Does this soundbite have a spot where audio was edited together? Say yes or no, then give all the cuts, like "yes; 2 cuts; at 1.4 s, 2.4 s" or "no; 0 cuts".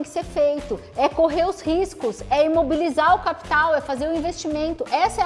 no; 0 cuts